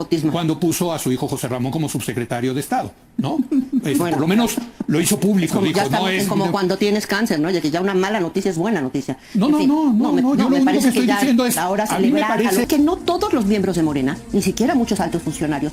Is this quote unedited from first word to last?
no; 1 cut; at 12.7 s

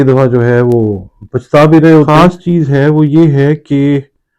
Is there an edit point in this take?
yes; 1 cut; at 2.1 s

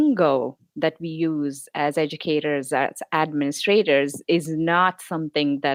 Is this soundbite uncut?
yes; 0 cuts

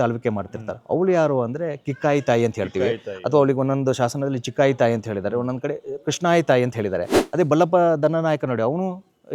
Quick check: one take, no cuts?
no; 1 cut; at 7.2 s

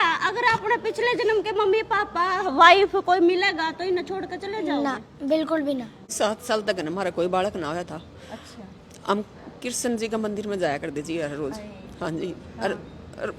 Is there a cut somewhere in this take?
yes; 1 cut; at 6.1 s

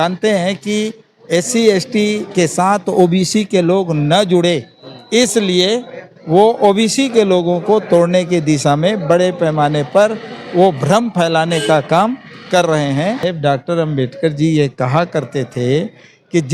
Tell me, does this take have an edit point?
yes; 1 cut; at 13.2 s

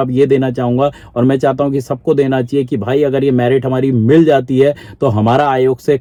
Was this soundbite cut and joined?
no; 0 cuts

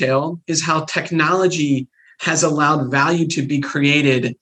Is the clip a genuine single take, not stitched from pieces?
yes; 0 cuts

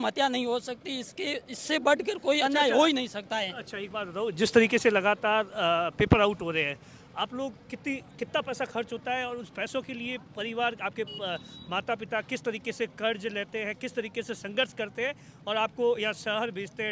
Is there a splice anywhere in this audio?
no; 0 cuts

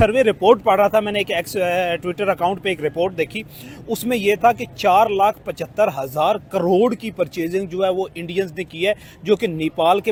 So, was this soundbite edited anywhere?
no; 0 cuts

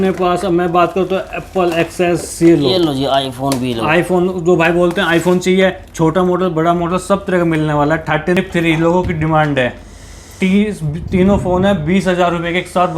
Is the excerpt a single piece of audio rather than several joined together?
no; 1 cut; at 8.4 s

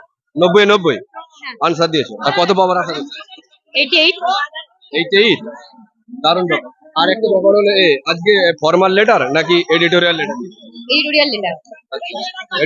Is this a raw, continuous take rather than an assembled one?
yes; 0 cuts

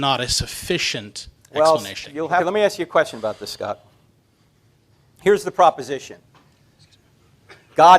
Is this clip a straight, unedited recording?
no; 1 cut; at 2.4 s

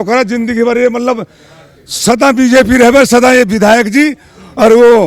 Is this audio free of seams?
yes; 0 cuts

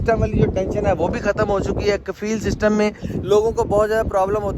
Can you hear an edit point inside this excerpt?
no; 0 cuts

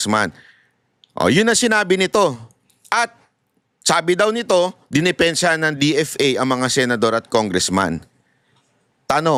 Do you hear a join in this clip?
no; 0 cuts

